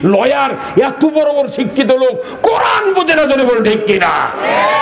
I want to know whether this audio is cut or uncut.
uncut